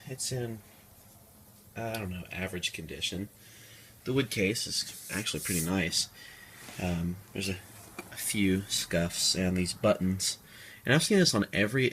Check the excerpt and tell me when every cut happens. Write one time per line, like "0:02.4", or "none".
0:08.5